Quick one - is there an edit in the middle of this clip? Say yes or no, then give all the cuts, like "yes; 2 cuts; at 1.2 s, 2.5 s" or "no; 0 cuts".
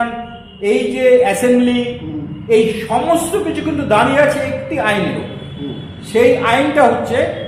no; 0 cuts